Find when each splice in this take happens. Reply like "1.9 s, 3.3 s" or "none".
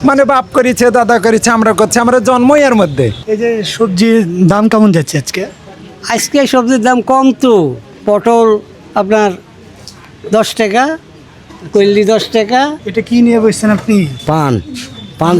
3.2 s, 7.9 s, 12.8 s